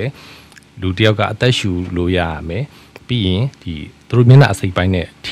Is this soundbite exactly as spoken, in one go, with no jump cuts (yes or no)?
yes